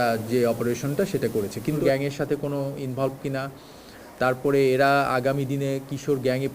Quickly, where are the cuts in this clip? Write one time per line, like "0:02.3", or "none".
0:01.8